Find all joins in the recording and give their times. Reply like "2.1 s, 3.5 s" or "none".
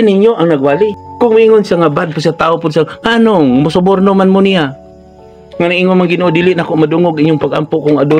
1.0 s